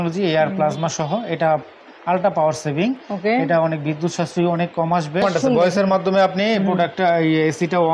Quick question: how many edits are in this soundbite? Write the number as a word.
one